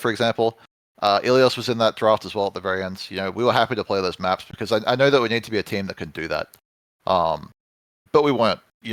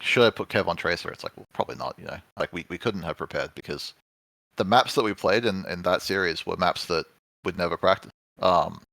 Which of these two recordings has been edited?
second; 1 cut; at 2.4 s

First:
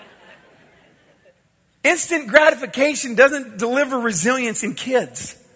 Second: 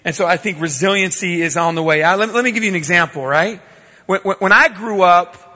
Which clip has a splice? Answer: first; 1 cut; at 1.3 s

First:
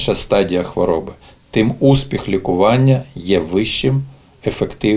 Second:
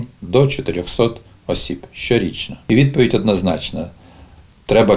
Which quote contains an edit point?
second; 1 cut; at 3.0 s

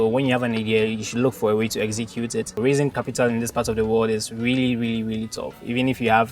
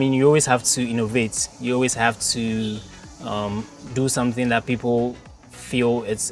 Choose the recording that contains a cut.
first; 1 cut; at 2.6 s

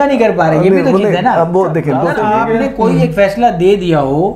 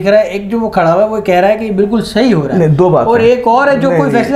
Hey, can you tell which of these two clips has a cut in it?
first; 1 cut; at 2.1 s

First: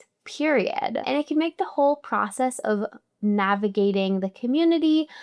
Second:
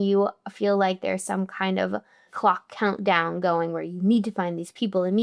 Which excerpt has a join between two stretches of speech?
first; 1 cut; at 1.0 s

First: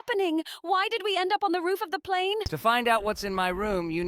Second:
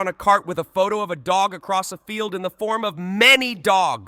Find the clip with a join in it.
first; 1 cut; at 2.5 s

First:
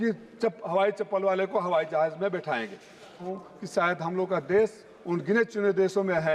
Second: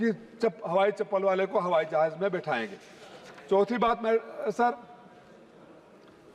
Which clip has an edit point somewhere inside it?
first; 1 cut; at 3.3 s

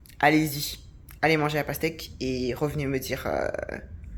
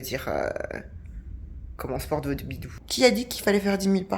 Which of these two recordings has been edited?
second; 1 cut; at 2.8 s

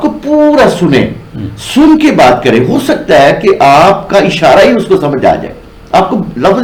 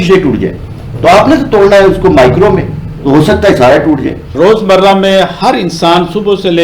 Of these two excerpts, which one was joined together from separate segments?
second; 1 cut; at 4.2 s

